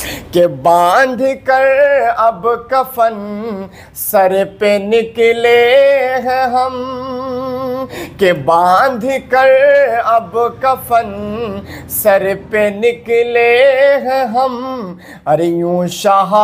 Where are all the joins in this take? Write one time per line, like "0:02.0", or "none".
none